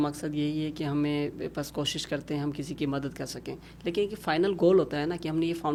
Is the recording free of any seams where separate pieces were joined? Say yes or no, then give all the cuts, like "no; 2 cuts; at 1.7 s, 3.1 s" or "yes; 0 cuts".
yes; 0 cuts